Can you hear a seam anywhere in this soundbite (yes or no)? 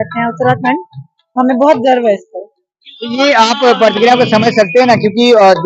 no